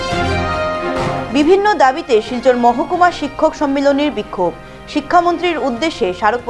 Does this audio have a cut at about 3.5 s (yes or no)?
no